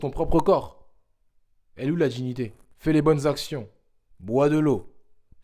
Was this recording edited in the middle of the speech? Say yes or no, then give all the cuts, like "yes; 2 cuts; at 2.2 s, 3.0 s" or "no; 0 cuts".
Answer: yes; 1 cut; at 2.6 s